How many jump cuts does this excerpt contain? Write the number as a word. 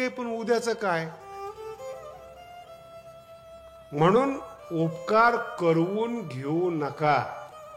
two